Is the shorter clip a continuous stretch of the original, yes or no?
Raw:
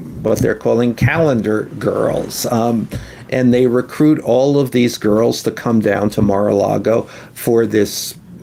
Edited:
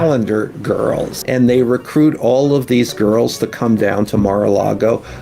no